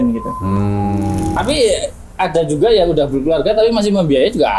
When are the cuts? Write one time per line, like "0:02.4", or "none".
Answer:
0:01.4